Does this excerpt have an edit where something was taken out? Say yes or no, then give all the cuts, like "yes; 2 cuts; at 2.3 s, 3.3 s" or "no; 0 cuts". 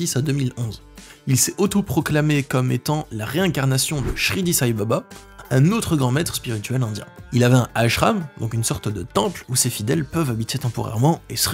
no; 0 cuts